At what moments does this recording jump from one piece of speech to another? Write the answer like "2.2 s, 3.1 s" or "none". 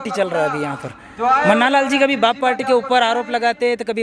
none